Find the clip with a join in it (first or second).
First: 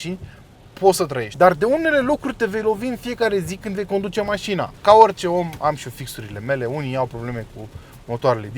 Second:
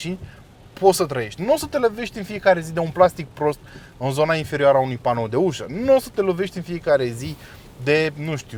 first